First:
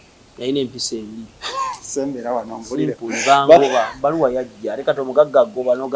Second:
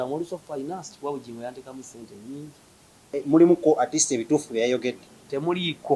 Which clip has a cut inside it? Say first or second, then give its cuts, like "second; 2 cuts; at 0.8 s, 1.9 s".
second; 1 cut; at 3.1 s